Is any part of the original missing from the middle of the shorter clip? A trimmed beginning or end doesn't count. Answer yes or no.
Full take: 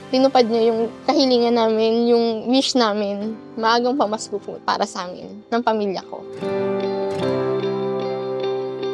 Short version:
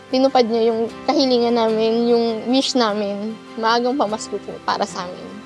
no